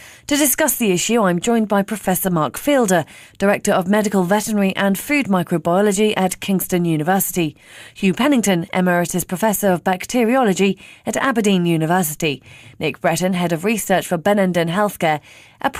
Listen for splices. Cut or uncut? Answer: uncut